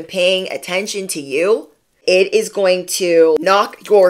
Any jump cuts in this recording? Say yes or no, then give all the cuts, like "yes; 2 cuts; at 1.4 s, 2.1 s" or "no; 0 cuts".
yes; 2 cuts; at 1.9 s, 3.4 s